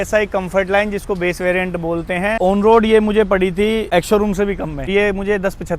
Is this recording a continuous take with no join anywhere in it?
no; 3 cuts; at 2.4 s, 3.9 s, 4.9 s

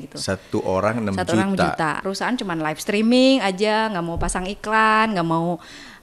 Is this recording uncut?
no; 1 cut; at 2.0 s

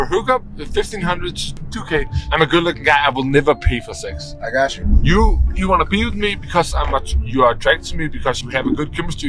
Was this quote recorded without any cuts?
no; 3 cuts; at 1.7 s, 4.8 s, 8.4 s

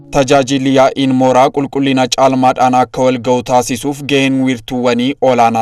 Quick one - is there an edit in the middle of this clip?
no; 0 cuts

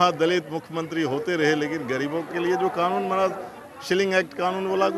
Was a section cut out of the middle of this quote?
no; 0 cuts

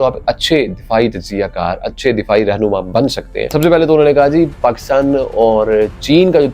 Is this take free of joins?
no; 1 cut; at 3.5 s

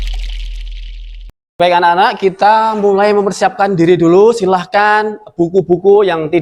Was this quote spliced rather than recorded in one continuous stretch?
yes; 1 cut; at 1.6 s

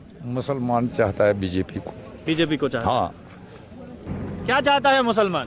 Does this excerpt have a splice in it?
yes; 1 cut; at 4.0 s

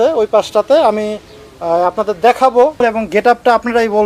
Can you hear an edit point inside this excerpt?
yes; 1 cut; at 2.8 s

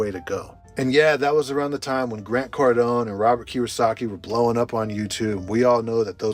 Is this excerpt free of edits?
yes; 0 cuts

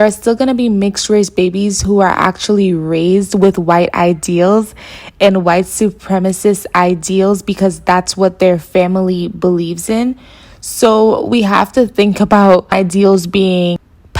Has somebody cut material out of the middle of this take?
yes; 1 cut; at 12.7 s

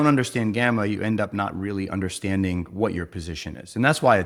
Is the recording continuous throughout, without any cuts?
yes; 0 cuts

